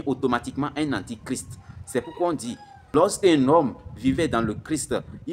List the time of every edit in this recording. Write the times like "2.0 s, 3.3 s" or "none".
2.9 s

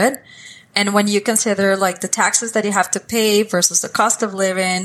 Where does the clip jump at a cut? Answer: none

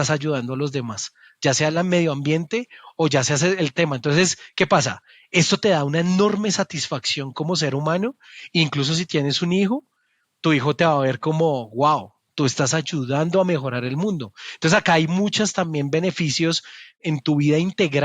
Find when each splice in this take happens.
17.0 s

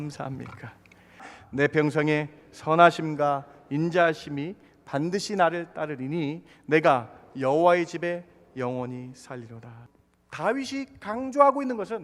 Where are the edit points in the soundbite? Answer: 1.3 s, 9.8 s

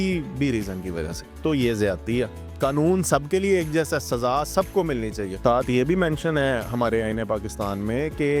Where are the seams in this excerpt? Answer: 5.3 s

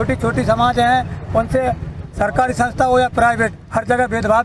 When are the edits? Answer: none

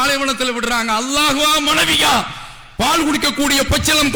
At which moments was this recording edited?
none

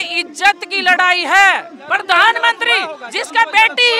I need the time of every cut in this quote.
1.8 s

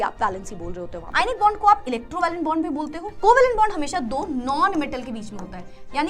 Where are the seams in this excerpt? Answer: 0.9 s, 3.0 s

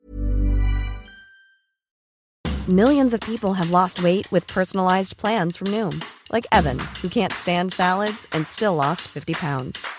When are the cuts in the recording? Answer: 2.0 s

